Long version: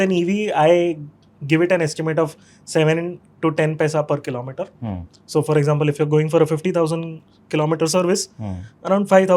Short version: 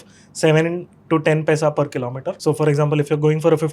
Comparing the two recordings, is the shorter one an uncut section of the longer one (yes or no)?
no